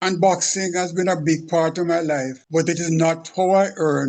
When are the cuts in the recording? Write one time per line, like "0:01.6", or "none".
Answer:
0:02.4